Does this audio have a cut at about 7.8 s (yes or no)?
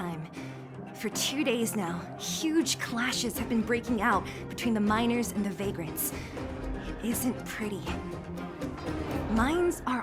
yes